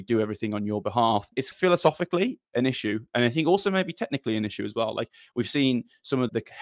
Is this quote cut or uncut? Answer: uncut